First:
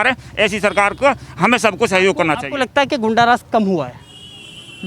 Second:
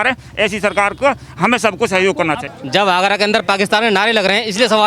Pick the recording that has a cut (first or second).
second